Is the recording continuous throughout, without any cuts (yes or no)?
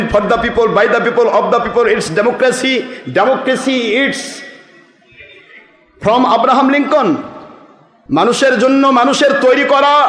yes